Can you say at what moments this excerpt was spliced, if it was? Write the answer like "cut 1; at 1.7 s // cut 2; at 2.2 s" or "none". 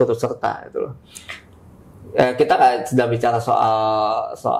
none

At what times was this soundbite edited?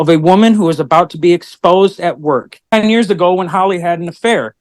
cut 1; at 2.6 s

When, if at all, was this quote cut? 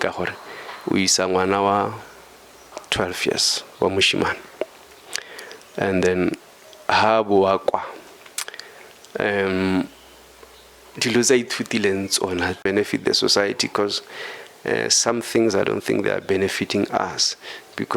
cut 1; at 12.6 s

